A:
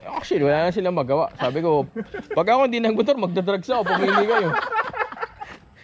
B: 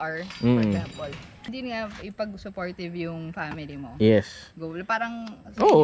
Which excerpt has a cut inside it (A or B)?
B